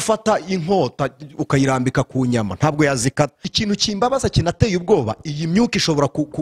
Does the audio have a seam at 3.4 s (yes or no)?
yes